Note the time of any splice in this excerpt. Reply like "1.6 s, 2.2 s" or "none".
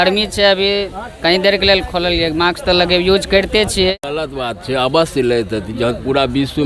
4.0 s